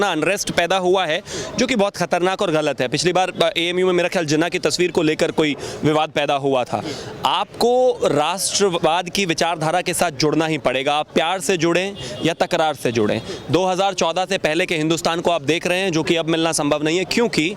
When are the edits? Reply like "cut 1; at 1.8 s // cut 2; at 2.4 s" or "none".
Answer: none